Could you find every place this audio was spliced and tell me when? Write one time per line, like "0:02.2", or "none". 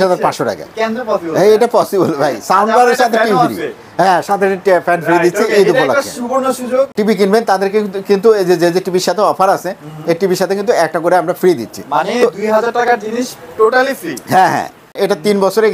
0:06.9
0:14.9